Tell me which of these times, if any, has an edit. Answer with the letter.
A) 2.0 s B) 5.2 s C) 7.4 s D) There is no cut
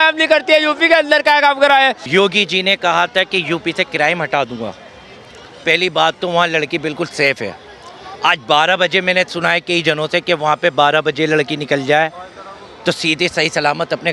A